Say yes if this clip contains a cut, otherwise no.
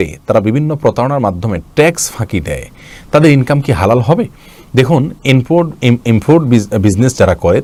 no